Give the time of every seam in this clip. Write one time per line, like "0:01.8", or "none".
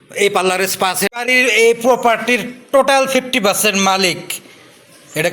0:01.1